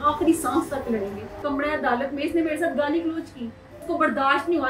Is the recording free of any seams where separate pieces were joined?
no; 2 cuts; at 1.4 s, 3.7 s

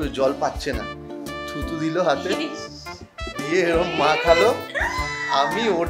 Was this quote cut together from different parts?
no; 0 cuts

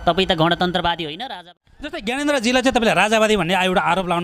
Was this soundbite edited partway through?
yes; 1 cut; at 1.3 s

